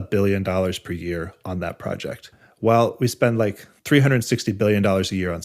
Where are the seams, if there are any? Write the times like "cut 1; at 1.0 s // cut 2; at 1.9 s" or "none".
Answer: cut 1; at 2.4 s // cut 2; at 3.7 s